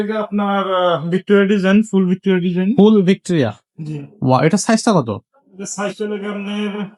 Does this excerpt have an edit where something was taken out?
no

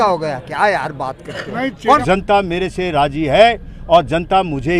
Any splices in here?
yes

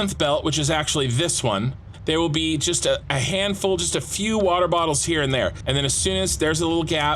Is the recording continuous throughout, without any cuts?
no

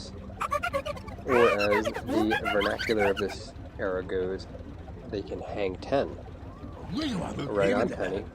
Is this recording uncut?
no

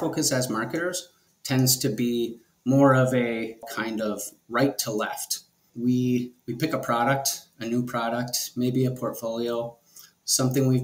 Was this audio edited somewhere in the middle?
yes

